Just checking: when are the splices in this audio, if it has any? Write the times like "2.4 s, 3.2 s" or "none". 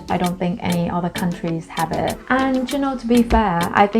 2.2 s